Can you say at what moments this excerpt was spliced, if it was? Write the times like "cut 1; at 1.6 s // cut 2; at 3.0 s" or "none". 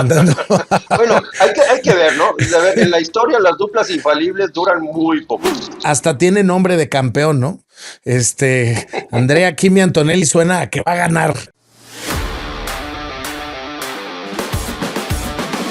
cut 1; at 5.8 s // cut 2; at 11.5 s